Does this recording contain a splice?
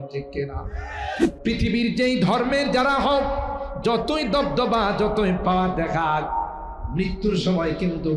yes; 1 cut; at 1.3 s

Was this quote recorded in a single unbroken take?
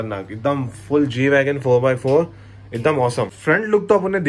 yes; 0 cuts

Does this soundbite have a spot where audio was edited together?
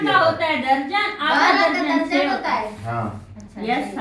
no; 0 cuts

